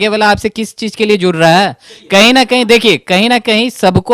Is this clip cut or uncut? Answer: uncut